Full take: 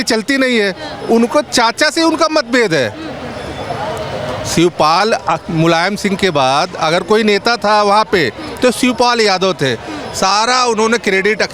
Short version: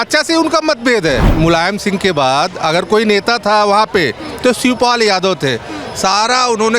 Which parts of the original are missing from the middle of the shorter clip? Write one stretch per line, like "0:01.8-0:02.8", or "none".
0:03.0-0:05.5